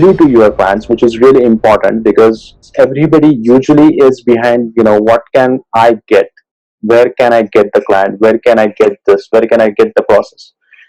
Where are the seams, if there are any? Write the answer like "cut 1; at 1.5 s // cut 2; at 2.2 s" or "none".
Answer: cut 1; at 2.7 s